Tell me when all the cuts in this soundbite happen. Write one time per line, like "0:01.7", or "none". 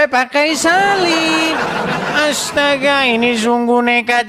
none